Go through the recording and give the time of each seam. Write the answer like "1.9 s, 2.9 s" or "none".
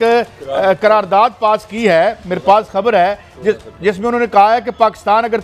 none